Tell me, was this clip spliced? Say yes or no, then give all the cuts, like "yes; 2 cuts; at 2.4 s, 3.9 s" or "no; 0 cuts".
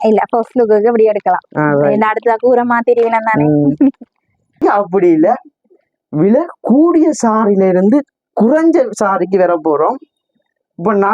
yes; 1 cut; at 4.6 s